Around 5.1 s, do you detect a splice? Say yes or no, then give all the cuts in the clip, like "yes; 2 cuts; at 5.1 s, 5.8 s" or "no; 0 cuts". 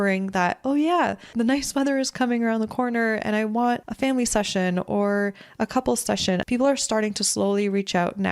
no; 3 cuts; at 1.3 s, 3.9 s, 6.4 s